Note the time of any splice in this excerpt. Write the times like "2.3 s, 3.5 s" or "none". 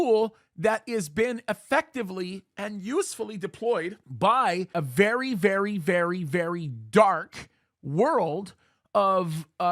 4.7 s